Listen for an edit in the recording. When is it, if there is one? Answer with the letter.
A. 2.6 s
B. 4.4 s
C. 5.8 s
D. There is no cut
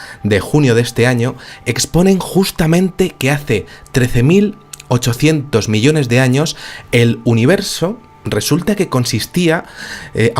B